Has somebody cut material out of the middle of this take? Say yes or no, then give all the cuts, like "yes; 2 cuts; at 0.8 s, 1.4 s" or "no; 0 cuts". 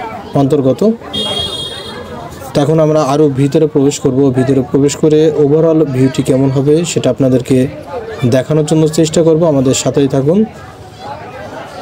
no; 0 cuts